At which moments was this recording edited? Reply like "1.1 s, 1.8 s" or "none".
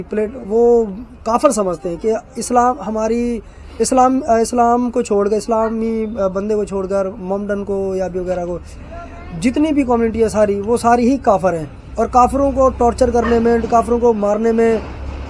none